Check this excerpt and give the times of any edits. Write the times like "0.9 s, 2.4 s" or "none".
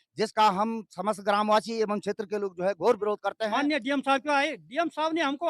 3.4 s